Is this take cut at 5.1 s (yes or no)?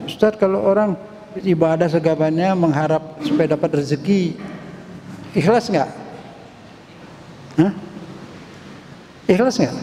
no